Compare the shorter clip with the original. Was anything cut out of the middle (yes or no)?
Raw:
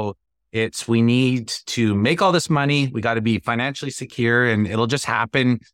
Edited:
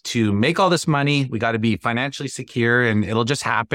no